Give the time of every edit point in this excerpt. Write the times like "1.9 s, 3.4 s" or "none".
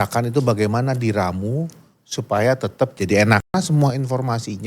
3.5 s